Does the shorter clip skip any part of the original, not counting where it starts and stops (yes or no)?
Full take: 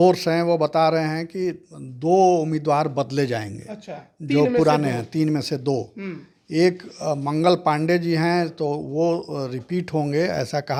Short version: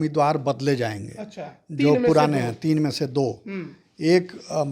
no